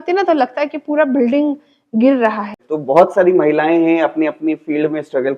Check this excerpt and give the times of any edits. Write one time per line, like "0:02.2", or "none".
0:02.6